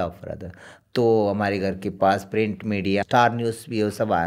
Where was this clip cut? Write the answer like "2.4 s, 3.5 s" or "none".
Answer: 3.0 s